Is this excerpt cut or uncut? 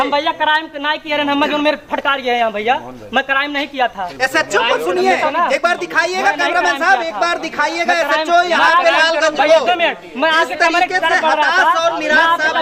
uncut